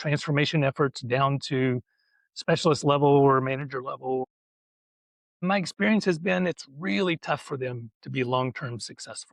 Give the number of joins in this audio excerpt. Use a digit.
0